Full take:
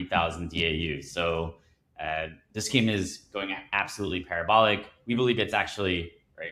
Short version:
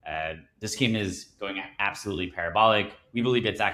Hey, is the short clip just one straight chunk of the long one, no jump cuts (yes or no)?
yes